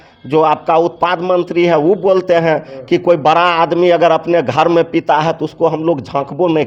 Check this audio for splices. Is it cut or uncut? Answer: uncut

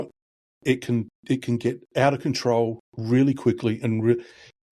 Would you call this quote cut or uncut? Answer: uncut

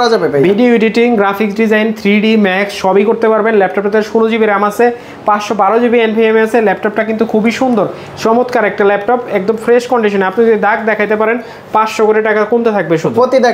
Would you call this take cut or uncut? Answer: uncut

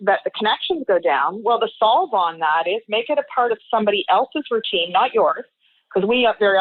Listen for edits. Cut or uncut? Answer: uncut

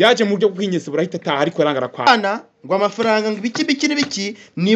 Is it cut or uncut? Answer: cut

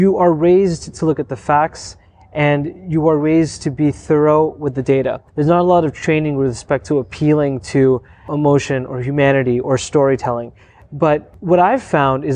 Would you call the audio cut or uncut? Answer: cut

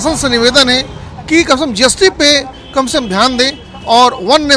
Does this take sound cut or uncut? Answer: uncut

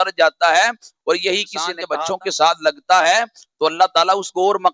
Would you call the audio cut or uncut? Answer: cut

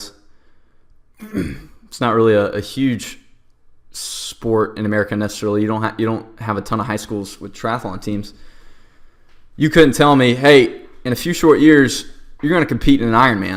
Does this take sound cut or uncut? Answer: cut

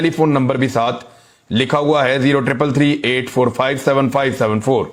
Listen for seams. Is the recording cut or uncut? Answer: uncut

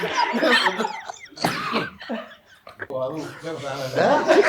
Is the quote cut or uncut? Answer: cut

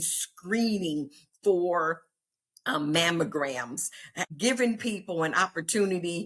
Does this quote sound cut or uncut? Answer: cut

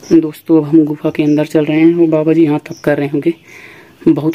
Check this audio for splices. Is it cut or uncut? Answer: uncut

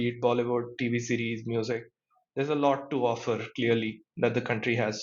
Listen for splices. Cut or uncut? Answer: uncut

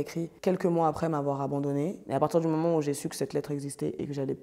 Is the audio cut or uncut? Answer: cut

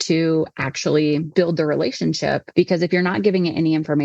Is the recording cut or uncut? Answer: cut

